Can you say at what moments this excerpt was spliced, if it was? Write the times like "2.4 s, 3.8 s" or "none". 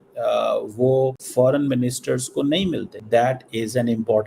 1.2 s, 2.9 s